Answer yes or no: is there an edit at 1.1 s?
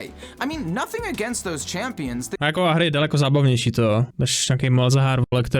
no